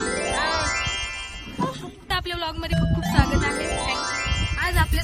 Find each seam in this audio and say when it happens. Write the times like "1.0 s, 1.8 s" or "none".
2.0 s